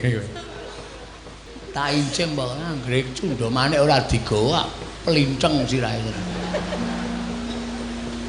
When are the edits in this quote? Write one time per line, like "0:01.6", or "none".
0:01.4
0:06.3